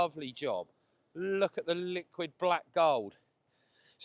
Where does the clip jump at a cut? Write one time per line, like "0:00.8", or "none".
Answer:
none